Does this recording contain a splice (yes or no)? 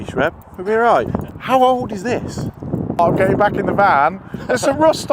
yes